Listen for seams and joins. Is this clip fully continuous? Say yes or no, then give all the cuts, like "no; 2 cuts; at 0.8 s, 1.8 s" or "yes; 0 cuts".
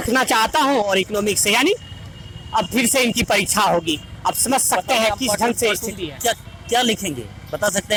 yes; 0 cuts